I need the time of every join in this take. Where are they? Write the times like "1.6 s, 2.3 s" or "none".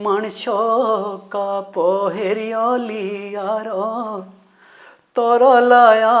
none